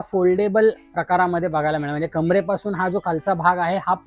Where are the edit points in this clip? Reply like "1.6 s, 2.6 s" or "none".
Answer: none